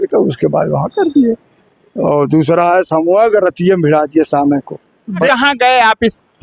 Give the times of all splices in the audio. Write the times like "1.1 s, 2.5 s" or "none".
5.3 s